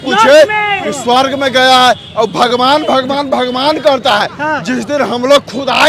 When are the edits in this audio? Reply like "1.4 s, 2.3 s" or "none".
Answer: none